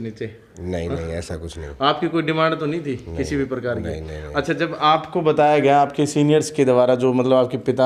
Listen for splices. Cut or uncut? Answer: uncut